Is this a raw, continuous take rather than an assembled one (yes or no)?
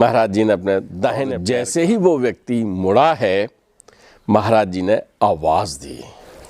no